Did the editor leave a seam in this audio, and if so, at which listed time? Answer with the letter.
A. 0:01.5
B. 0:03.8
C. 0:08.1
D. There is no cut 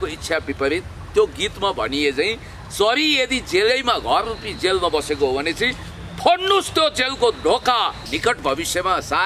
C